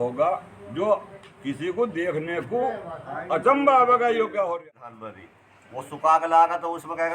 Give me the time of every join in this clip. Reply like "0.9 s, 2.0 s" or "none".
4.6 s